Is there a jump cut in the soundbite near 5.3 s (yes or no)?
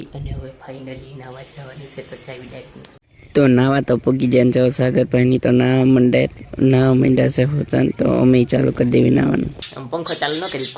no